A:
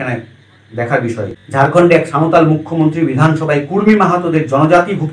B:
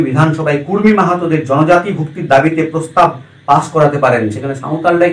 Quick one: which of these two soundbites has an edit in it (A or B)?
A